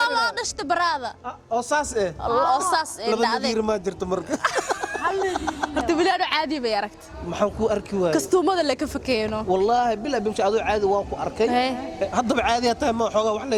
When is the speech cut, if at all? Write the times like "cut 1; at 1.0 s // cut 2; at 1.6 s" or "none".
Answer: none